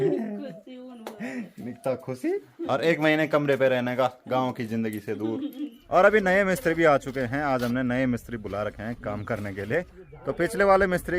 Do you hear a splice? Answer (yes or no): yes